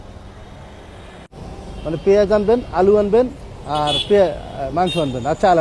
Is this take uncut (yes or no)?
yes